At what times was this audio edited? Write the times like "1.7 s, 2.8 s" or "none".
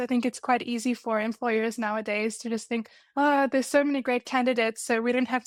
none